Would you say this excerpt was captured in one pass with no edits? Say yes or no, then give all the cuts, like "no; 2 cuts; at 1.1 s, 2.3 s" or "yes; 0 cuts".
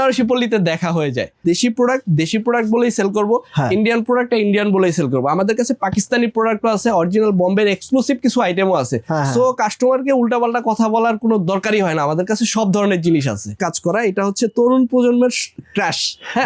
no; 2 cuts; at 1.3 s, 13.5 s